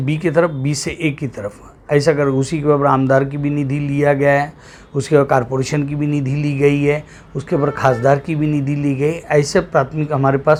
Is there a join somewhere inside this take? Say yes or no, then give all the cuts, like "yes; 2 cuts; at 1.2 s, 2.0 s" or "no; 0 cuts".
no; 0 cuts